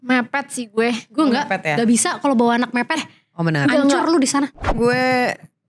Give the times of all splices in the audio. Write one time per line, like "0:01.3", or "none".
0:04.7